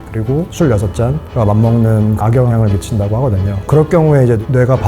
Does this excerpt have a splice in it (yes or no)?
yes